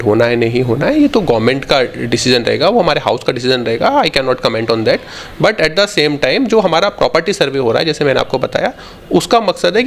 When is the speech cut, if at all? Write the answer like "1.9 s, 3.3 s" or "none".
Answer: none